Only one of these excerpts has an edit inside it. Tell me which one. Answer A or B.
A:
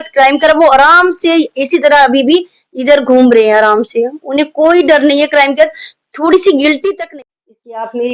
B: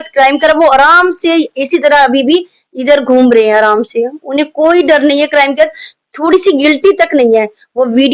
A